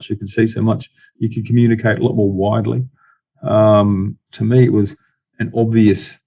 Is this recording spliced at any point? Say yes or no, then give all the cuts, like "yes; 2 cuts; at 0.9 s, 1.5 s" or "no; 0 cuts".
no; 0 cuts